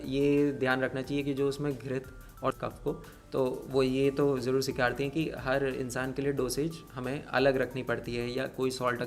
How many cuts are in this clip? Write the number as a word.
one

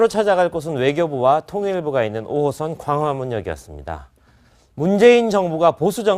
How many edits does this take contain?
zero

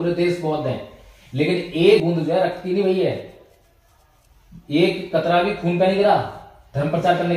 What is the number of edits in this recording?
one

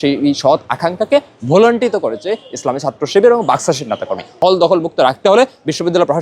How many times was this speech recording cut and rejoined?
one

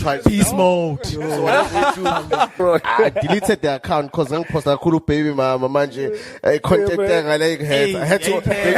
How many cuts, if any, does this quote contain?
one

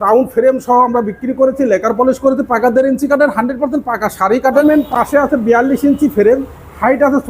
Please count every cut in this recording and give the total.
one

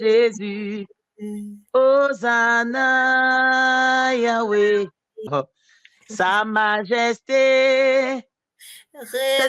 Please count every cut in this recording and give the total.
one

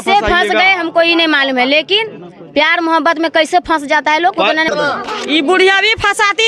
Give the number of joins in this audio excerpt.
one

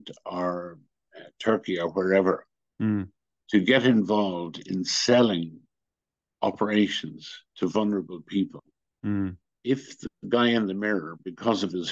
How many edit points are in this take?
one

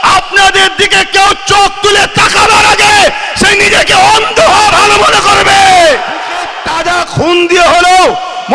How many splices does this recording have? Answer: one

